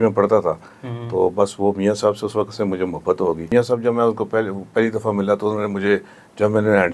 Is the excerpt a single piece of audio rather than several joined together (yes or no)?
no